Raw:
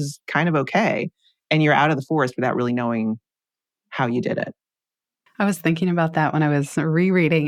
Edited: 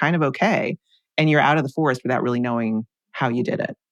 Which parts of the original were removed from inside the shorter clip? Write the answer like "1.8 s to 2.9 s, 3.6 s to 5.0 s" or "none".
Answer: 3.3 s to 3.8 s